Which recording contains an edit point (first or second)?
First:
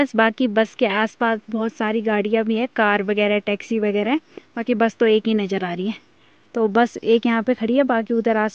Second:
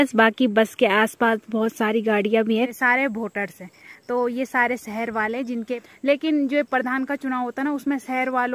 second